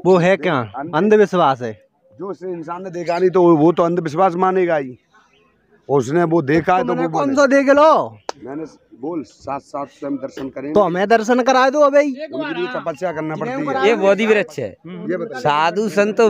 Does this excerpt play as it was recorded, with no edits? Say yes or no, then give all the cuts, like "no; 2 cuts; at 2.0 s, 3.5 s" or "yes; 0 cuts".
no; 1 cut; at 13.7 s